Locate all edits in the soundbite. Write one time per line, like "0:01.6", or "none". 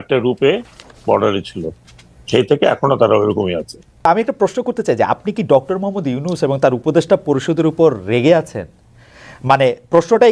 0:04.1